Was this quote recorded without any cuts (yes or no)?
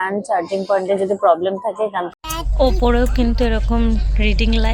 no